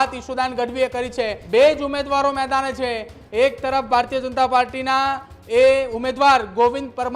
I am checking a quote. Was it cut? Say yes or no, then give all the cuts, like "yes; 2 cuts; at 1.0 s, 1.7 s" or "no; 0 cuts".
yes; 1 cut; at 1.4 s